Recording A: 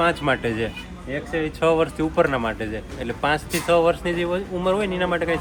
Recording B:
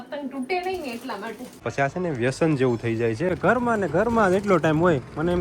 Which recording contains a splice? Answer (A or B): B